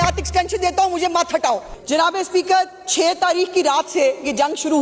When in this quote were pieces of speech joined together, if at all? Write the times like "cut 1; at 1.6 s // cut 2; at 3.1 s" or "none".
cut 1; at 1.7 s